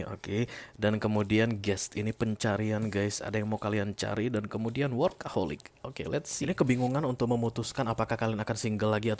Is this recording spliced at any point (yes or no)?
yes